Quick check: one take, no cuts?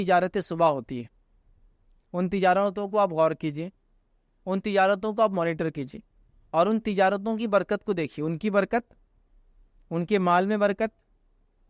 yes; 0 cuts

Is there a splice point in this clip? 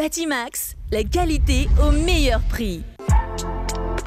yes; 1 cut; at 2.9 s

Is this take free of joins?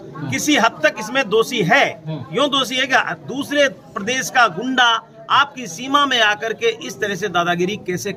yes; 0 cuts

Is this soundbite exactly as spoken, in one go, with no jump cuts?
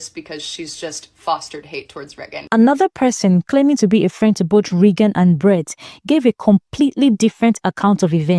no; 1 cut; at 2.3 s

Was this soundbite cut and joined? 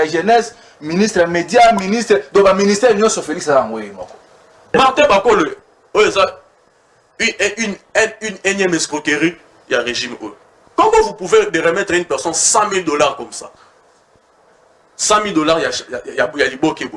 yes; 1 cut; at 4.7 s

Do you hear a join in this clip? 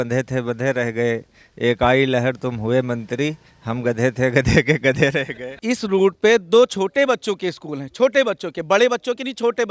yes; 1 cut; at 5.6 s

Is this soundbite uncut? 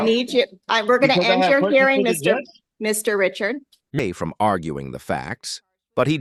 yes; 0 cuts

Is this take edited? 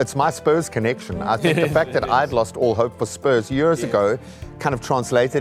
no; 0 cuts

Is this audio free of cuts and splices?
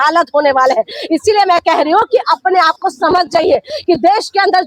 yes; 0 cuts

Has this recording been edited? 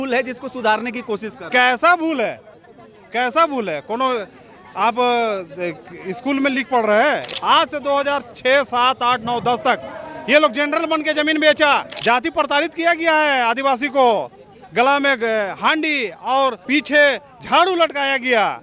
yes; 3 cuts; at 7.4 s, 11.9 s, 16.6 s

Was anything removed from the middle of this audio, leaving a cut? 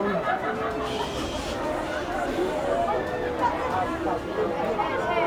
no; 0 cuts

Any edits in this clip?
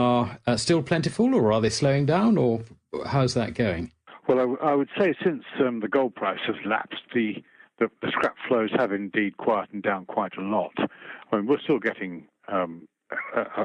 no; 0 cuts

